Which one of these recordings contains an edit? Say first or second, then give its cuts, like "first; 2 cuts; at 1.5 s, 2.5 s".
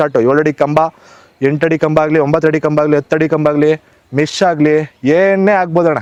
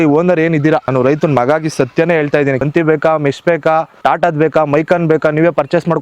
second; 3 cuts; at 0.9 s, 2.6 s, 3.9 s